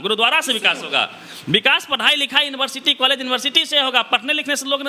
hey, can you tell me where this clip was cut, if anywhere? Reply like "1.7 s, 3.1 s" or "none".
none